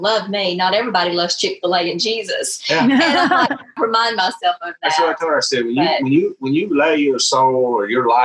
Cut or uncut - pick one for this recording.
cut